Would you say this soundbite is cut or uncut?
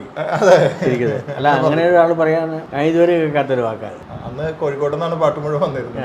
cut